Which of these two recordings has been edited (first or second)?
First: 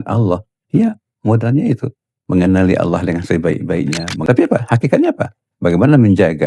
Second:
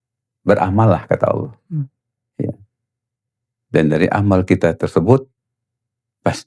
first